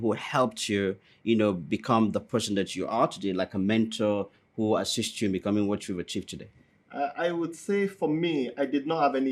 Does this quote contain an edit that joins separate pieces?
no; 0 cuts

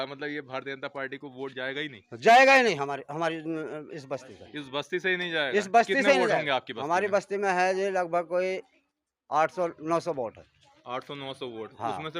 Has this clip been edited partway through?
no; 0 cuts

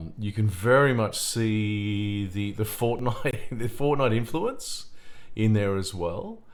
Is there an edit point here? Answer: no; 0 cuts

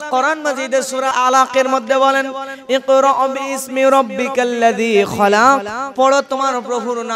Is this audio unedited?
no; 1 cut; at 1.1 s

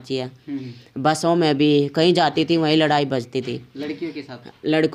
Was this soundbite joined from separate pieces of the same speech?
no; 0 cuts

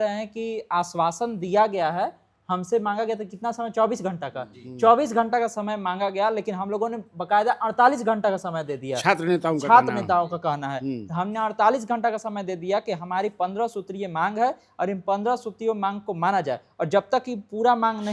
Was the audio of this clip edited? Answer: no; 0 cuts

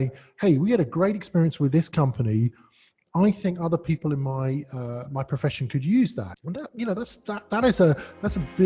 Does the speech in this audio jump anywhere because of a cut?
yes; 1 cut; at 6.4 s

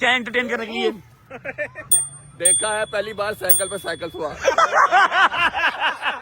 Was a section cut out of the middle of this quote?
no; 0 cuts

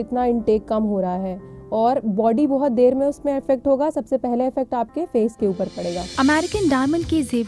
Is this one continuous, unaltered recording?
no; 1 cut; at 6.1 s

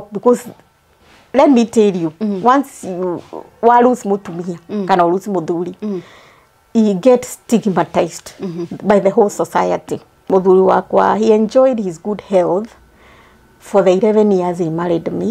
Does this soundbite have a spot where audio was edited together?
yes; 1 cut; at 10.3 s

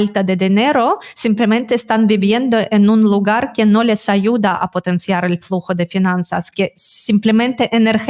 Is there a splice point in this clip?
no; 0 cuts

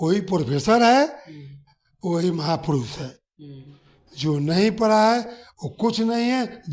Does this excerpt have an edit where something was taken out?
no; 0 cuts

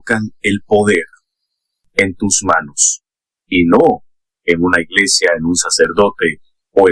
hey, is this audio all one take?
yes; 0 cuts

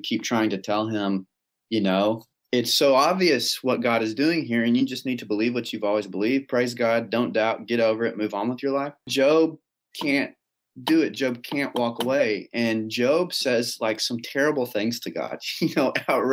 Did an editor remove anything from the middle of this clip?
yes; 2 cuts; at 2.3 s, 9.1 s

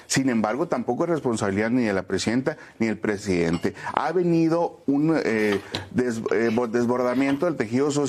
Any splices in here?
no; 0 cuts

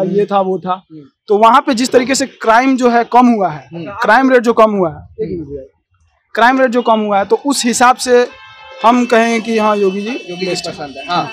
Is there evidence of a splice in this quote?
no; 0 cuts

